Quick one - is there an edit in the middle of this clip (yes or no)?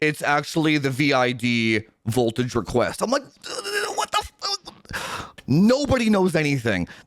yes